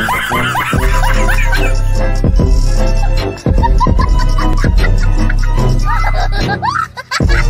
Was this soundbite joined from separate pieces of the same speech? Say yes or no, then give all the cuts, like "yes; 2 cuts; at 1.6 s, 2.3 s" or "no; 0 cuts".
no; 0 cuts